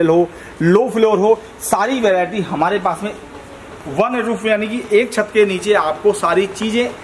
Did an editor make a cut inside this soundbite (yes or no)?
no